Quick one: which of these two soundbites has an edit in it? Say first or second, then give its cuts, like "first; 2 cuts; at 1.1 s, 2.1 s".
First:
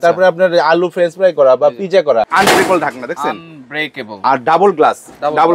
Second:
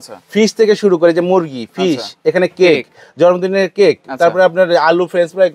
first; 1 cut; at 2.3 s